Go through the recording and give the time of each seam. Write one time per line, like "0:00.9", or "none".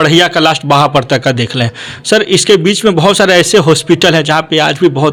none